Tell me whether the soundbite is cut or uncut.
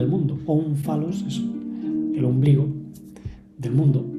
uncut